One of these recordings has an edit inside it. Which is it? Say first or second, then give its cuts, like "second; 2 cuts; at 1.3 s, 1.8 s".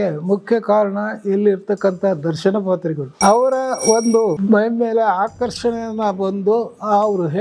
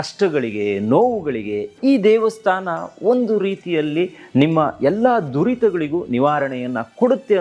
first; 2 cuts; at 3.1 s, 4.4 s